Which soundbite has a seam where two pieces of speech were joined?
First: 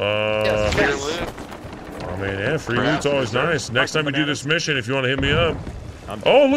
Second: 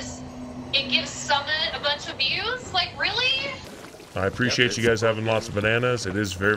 second; 1 cut; at 3.7 s

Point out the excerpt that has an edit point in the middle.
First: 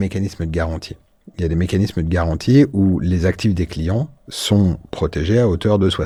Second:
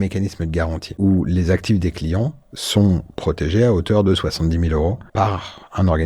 second; 2 cuts; at 1.0 s, 5.0 s

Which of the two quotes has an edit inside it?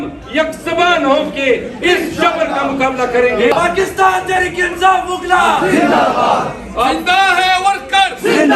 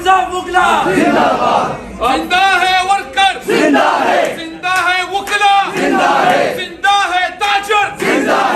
first; 1 cut; at 3.5 s

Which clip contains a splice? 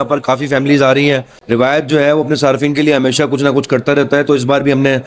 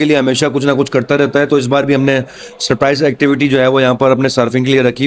first; 1 cut; at 1.3 s

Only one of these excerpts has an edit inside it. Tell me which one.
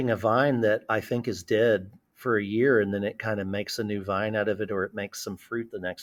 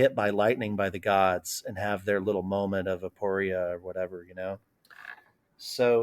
second; 1 cut; at 5.1 s

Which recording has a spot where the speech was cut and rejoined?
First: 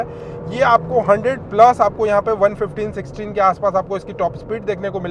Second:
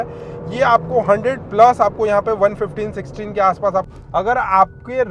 second; 1 cut; at 4.0 s

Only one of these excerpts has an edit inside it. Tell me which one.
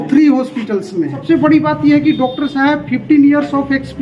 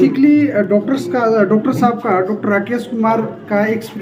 first; 1 cut; at 1.2 s

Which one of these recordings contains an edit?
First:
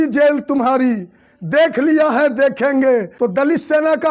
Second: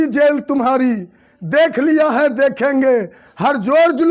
first; 1 cut; at 3.1 s

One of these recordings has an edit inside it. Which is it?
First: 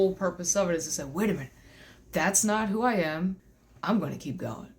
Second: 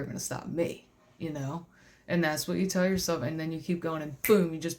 first; 1 cut; at 3.5 s

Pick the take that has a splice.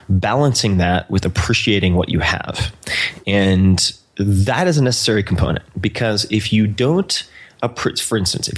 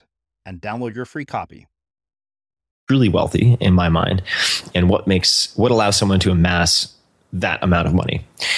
second; 1 cut; at 2.8 s

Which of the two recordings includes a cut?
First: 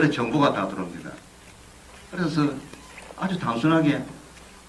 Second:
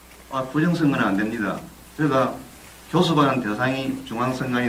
first; 1 cut; at 2.5 s

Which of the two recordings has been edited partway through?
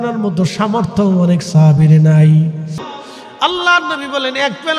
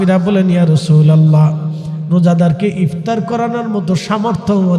first; 1 cut; at 2.9 s

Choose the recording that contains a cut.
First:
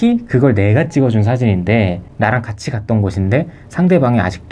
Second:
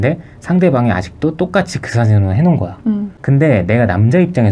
second; 1 cut; at 3.1 s

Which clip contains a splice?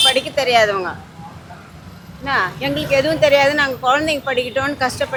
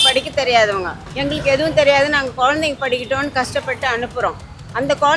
second; 1 cut; at 1.1 s

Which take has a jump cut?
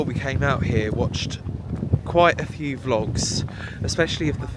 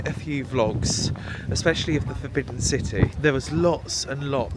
second; 1 cut; at 3.1 s

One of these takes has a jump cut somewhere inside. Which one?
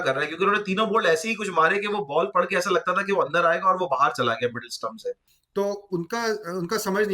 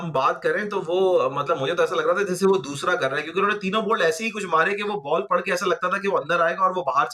first; 1 cut; at 5.3 s

